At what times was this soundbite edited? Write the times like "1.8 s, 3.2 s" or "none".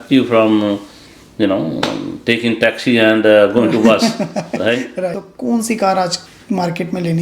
5.1 s, 6.3 s